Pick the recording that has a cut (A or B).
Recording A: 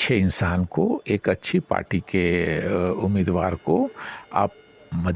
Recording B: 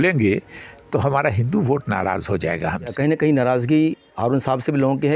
B